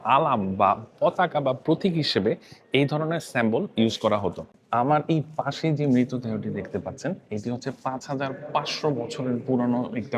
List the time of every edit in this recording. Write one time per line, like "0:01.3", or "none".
0:04.5